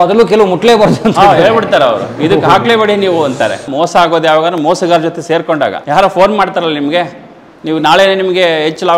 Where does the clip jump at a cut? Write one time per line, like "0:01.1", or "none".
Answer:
0:03.7
0:05.8